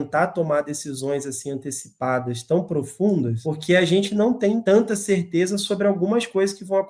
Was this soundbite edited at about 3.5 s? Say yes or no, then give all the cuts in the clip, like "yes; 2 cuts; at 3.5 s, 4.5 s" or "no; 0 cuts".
yes; 2 cuts; at 3.5 s, 4.6 s